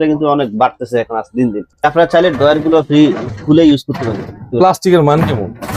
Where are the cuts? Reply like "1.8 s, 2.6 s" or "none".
1.7 s